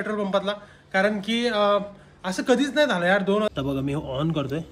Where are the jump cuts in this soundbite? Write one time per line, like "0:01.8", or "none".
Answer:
0:03.5

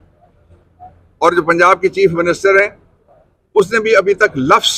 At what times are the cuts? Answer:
none

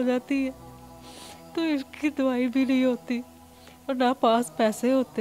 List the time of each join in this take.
none

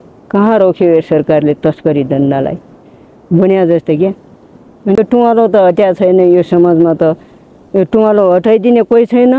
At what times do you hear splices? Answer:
0:05.0

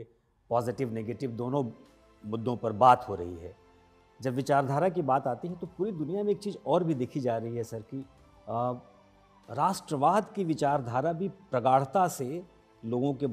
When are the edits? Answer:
none

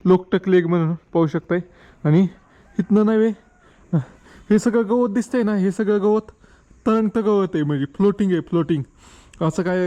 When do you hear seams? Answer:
none

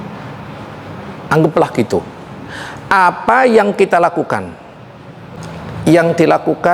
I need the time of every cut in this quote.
0:05.3

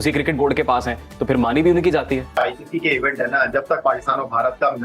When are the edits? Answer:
0:02.3

